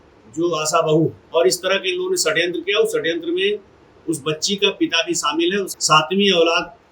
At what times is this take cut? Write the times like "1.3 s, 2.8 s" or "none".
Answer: 1.2 s, 5.7 s